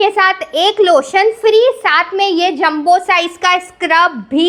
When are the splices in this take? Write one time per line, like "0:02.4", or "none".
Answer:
none